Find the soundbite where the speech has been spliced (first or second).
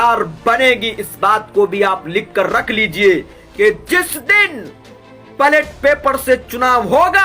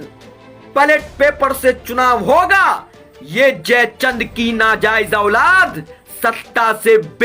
first